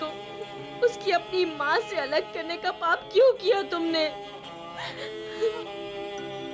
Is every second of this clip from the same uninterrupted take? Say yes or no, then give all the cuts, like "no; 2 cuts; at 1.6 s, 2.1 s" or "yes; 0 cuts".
yes; 0 cuts